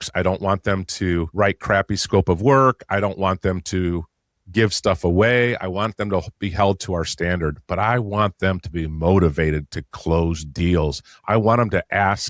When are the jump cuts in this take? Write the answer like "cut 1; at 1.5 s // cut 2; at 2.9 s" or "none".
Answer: cut 1; at 1.8 s